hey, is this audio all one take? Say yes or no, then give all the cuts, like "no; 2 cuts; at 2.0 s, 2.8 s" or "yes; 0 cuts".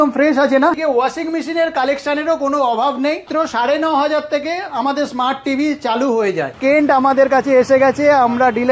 no; 3 cuts; at 0.8 s, 3.3 s, 6.6 s